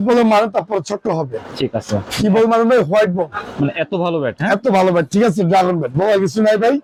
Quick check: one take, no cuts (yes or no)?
yes